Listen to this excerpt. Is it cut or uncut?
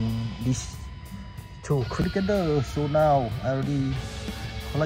cut